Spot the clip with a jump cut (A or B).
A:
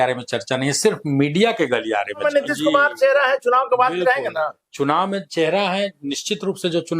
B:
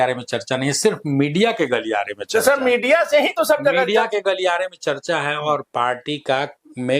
A